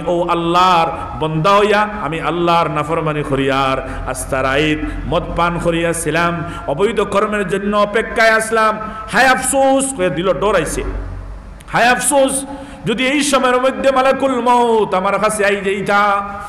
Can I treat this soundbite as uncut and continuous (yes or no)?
no